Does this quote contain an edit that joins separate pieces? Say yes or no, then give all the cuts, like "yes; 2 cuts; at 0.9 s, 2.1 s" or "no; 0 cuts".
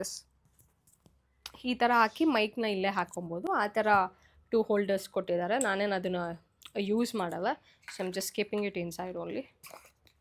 no; 0 cuts